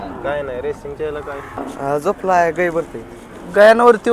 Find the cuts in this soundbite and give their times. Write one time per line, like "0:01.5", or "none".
0:01.7